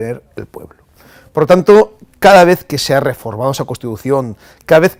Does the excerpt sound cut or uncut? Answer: uncut